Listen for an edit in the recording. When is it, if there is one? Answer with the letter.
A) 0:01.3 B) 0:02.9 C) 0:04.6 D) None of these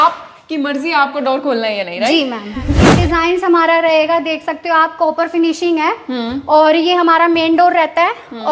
B